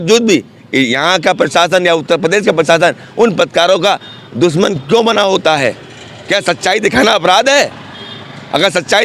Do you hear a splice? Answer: no; 0 cuts

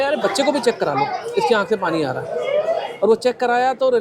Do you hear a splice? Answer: no; 0 cuts

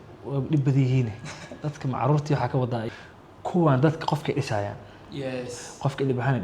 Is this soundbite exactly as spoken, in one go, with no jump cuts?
no; 1 cut; at 2.9 s

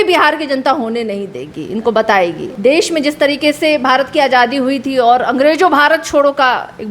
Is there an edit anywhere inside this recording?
yes; 1 cut; at 2.5 s

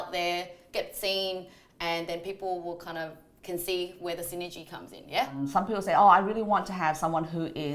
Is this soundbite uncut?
no; 1 cut; at 5.4 s

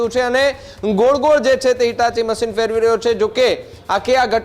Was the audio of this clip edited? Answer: no; 0 cuts

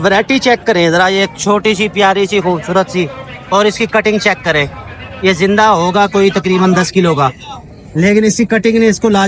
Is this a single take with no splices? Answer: yes; 0 cuts

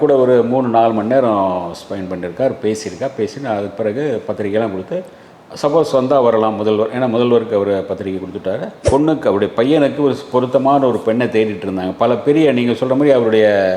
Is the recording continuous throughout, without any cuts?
no; 1 cut; at 8.8 s

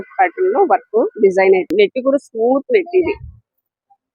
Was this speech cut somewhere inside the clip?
yes; 1 cut; at 1.7 s

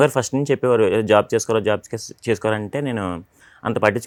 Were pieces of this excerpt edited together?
no; 0 cuts

